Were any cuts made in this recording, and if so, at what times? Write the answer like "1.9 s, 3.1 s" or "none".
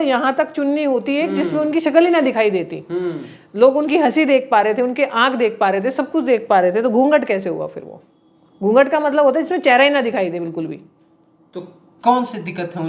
none